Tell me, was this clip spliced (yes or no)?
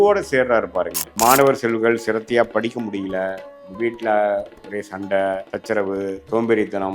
yes